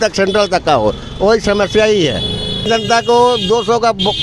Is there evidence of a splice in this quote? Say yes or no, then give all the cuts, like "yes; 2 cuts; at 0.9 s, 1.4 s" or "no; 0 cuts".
yes; 1 cut; at 2.7 s